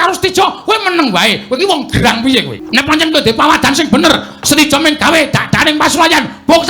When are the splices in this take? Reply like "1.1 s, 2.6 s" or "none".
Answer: 2.6 s